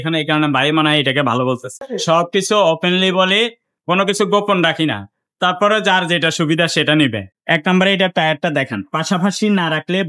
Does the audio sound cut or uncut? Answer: cut